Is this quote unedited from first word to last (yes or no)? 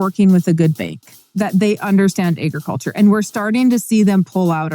no